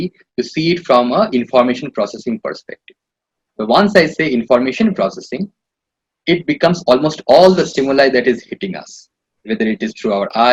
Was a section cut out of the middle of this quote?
no; 0 cuts

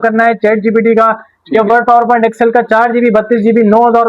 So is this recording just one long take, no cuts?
yes; 0 cuts

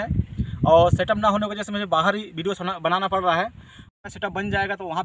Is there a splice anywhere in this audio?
no; 0 cuts

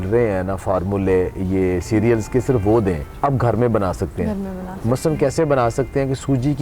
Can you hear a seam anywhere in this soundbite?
yes; 1 cut; at 3.1 s

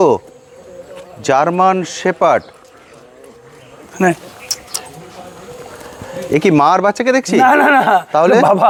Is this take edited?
no; 0 cuts

